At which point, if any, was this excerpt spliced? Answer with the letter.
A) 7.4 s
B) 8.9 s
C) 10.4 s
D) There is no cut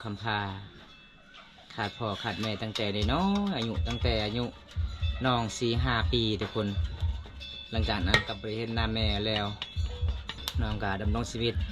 C